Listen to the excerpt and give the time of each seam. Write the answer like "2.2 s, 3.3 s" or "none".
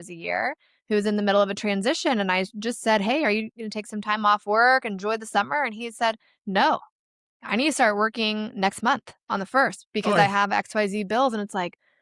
none